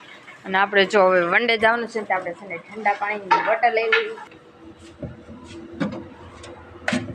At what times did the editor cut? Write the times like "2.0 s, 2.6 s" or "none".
4.2 s